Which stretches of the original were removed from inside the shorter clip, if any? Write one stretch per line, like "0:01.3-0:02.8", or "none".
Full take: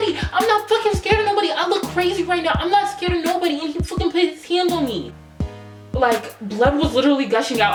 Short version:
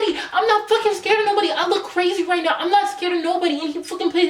none